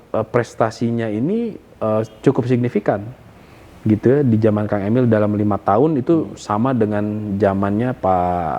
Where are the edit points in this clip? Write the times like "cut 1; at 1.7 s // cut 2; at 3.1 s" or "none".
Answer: none

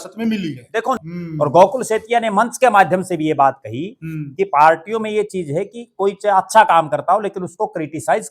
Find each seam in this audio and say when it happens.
cut 1; at 1.0 s

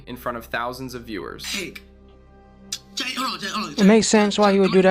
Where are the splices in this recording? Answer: none

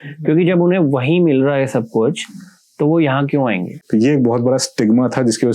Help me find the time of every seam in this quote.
cut 1; at 3.7 s

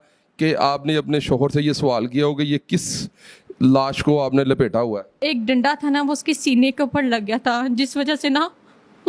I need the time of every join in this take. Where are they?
cut 1; at 5.2 s

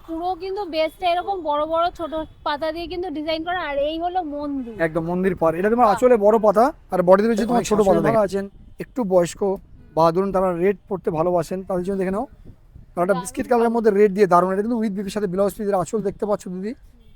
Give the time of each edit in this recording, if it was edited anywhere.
cut 1; at 8.1 s

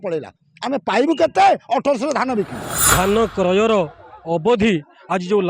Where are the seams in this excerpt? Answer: cut 1; at 2.8 s

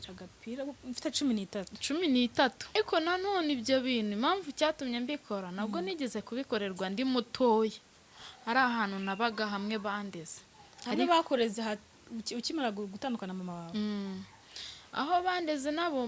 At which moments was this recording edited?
cut 1; at 2.8 s

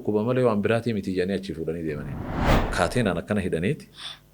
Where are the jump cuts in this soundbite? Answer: cut 1; at 2.5 s

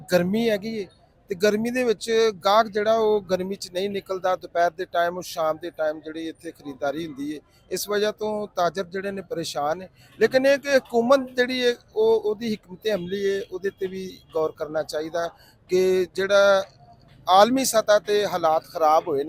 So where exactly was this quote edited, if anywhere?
none

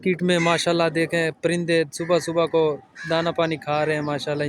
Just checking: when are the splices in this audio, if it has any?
none

